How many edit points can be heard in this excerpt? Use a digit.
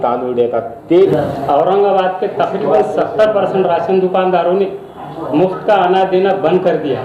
1